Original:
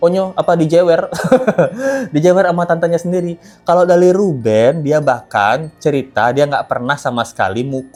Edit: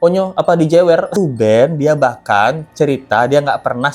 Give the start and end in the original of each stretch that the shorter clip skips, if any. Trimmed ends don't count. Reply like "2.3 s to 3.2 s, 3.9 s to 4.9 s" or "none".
1.2 s to 4.2 s